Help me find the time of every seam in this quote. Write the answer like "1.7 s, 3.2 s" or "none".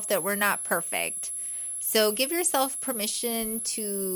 none